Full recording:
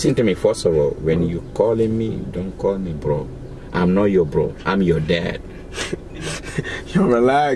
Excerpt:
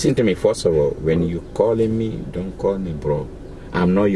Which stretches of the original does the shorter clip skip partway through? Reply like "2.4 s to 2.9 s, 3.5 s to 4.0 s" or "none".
none